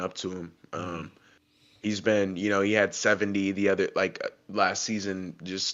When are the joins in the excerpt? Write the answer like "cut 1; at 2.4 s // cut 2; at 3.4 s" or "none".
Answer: none